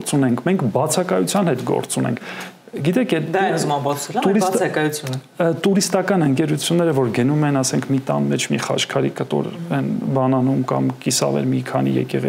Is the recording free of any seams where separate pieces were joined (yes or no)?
yes